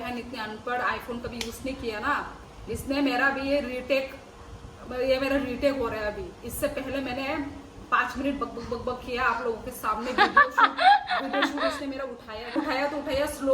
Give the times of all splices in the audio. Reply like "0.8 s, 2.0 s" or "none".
12.6 s